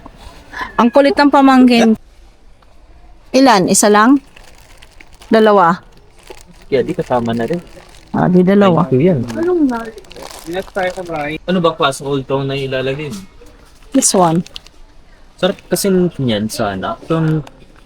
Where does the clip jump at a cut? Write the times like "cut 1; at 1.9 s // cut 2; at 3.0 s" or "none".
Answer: cut 1; at 2.0 s // cut 2; at 11.4 s